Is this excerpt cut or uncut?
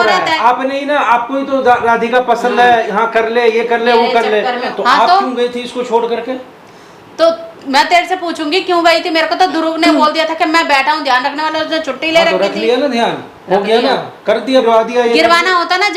cut